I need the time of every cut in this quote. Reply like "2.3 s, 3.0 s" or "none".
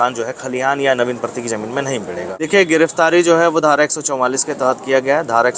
2.4 s